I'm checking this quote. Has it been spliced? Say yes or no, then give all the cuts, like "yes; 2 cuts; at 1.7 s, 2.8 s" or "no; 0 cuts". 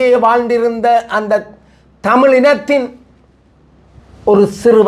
no; 0 cuts